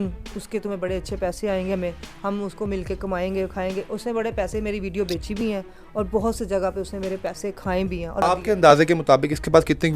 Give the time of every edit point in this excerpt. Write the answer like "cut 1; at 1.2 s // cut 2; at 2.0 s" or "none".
cut 1; at 8.2 s

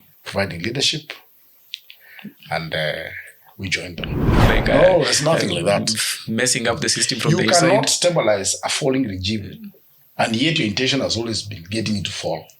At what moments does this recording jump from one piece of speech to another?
cut 1; at 4.4 s

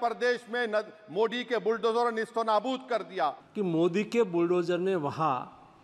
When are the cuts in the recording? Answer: cut 1; at 3.4 s

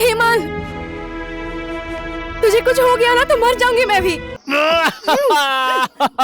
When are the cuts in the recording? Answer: cut 1; at 4.3 s

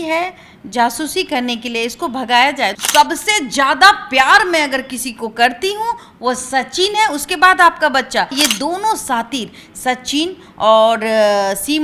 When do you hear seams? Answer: cut 1; at 2.8 s // cut 2; at 8.3 s

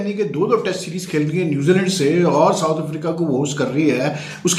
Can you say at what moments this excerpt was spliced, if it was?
none

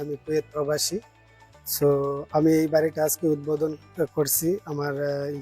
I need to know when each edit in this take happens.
none

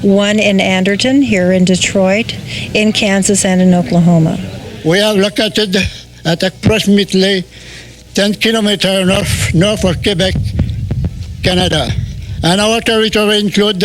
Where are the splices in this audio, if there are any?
cut 1; at 4.6 s

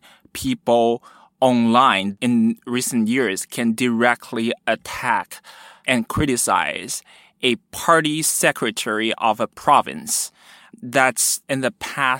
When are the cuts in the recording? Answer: cut 1; at 2.1 s

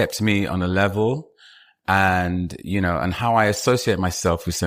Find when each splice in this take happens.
none

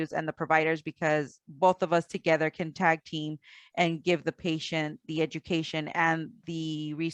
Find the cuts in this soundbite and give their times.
none

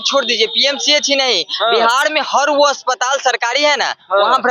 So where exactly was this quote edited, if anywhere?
none

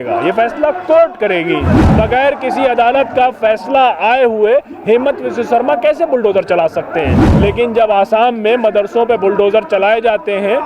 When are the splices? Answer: cut 1; at 1.8 s // cut 2; at 7.2 s

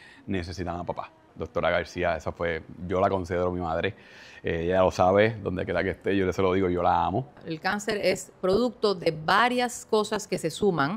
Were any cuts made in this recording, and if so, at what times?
cut 1; at 1.3 s // cut 2; at 7.4 s

